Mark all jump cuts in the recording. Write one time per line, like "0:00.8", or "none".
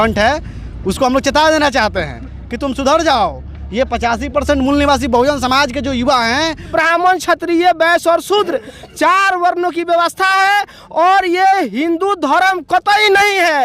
0:06.7